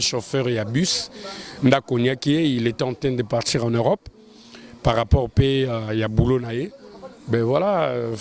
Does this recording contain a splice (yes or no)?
no